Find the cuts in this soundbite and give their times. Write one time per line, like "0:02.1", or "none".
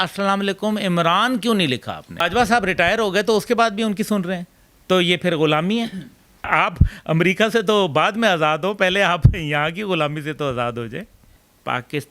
0:02.3
0:06.4
0:11.3